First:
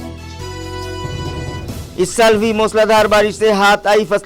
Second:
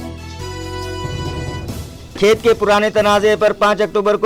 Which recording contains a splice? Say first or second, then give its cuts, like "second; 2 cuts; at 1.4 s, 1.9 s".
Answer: first; 1 cut; at 1.5 s